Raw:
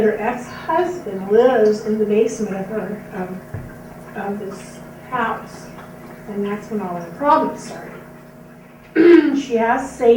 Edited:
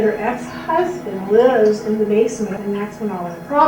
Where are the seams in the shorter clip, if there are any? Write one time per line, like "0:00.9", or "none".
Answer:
0:02.6